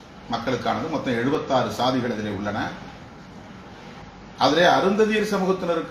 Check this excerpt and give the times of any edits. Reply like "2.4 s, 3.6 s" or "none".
4.0 s